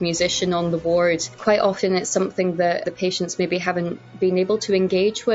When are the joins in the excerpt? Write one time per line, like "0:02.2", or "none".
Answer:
0:01.3
0:02.8